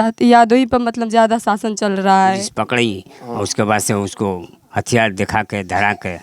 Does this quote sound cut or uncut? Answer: cut